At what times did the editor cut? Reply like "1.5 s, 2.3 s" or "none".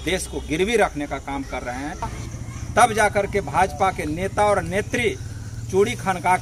2.2 s